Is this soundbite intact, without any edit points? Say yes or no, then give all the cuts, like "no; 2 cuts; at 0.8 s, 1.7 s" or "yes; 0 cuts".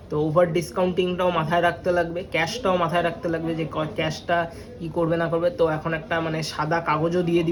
yes; 0 cuts